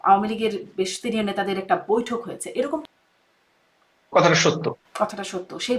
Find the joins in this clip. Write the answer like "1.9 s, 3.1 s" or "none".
2.8 s